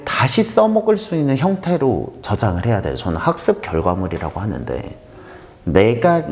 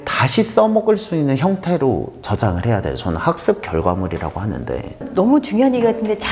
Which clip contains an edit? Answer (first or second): second